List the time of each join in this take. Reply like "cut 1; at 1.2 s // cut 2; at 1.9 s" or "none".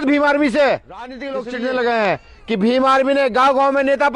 cut 1; at 1.3 s